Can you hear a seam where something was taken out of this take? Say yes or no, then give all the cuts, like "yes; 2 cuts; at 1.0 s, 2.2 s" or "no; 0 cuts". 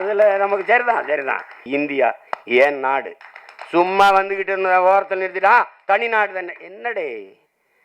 yes; 1 cut; at 1.6 s